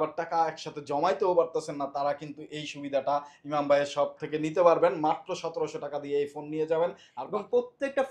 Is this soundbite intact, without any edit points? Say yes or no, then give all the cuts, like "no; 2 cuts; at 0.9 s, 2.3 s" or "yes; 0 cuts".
no; 1 cut; at 7.1 s